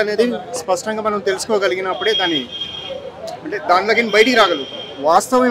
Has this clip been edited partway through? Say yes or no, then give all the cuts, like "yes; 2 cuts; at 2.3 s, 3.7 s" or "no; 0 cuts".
no; 0 cuts